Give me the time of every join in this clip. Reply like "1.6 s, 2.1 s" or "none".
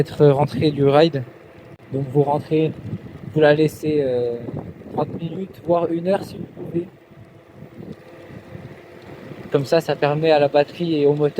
none